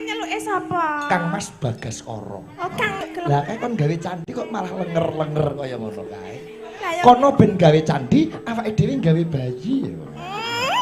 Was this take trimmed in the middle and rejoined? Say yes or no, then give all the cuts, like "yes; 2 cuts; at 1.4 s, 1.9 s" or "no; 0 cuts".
yes; 1 cut; at 3.0 s